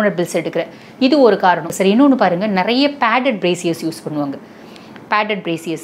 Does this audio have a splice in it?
yes; 1 cut; at 1.7 s

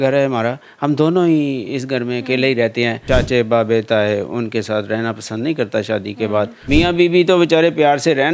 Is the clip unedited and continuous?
no; 2 cuts; at 3.0 s, 6.6 s

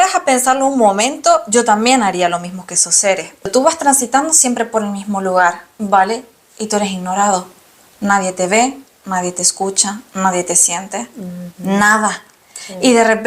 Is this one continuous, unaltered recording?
no; 1 cut; at 3.5 s

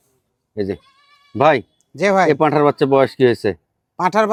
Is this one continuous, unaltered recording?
yes; 0 cuts

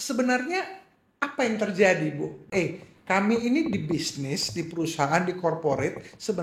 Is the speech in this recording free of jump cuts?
no; 1 cut; at 2.5 s

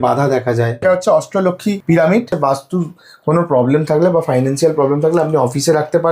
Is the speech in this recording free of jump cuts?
no; 3 cuts; at 0.8 s, 1.8 s, 2.3 s

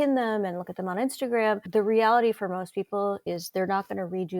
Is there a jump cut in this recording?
yes; 2 cuts; at 1.7 s, 3.2 s

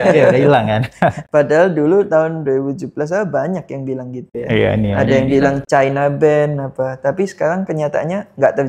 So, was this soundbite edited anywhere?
no; 0 cuts

